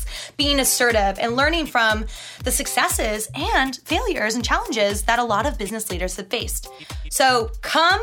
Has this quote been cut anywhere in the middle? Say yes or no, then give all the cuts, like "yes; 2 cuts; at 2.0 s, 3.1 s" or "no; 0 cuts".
no; 0 cuts